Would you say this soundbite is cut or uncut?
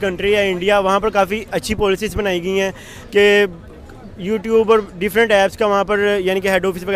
uncut